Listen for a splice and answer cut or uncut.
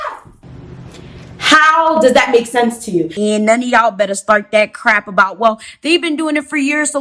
uncut